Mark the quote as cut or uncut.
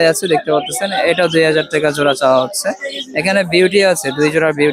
uncut